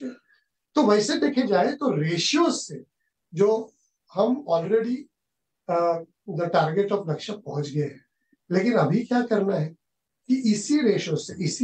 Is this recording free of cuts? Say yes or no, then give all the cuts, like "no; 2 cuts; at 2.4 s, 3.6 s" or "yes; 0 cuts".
no; 1 cut; at 6.2 s